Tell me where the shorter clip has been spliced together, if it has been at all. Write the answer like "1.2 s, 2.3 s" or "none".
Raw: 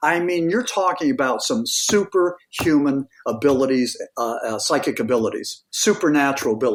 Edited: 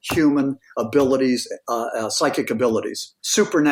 none